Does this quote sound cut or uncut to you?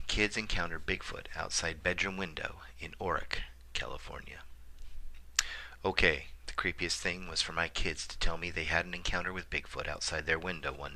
cut